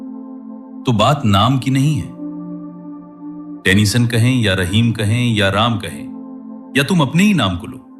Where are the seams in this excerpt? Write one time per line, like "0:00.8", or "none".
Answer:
0:00.8
0:02.0
0:03.6